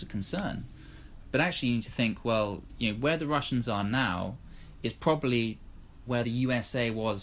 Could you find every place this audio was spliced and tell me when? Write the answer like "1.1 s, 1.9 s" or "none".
6.2 s